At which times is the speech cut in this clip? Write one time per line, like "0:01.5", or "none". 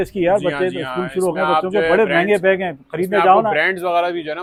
none

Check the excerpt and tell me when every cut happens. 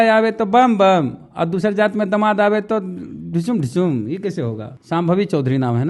0:04.7

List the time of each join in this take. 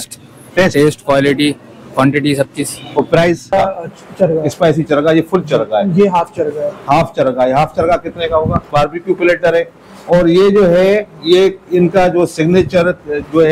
0:03.5
0:08.7

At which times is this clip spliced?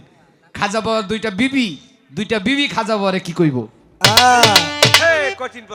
none

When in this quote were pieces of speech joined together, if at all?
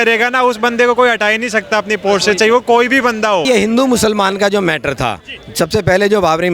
0:03.4

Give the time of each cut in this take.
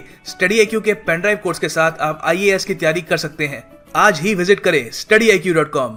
none

